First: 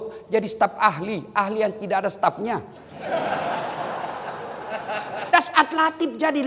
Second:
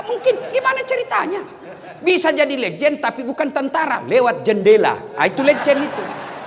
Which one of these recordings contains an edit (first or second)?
first